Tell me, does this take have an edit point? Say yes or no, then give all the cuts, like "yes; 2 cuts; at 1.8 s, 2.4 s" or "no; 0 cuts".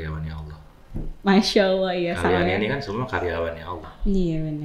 no; 0 cuts